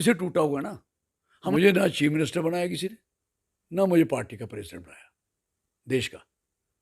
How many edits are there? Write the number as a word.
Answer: one